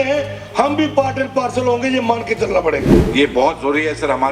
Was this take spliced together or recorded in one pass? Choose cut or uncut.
cut